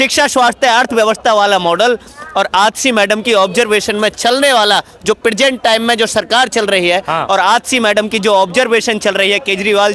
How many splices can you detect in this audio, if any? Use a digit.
0